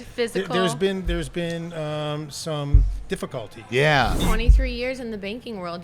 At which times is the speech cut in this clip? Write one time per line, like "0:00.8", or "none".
0:04.2